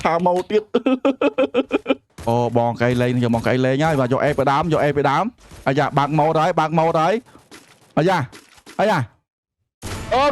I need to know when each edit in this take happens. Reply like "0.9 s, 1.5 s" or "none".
2.1 s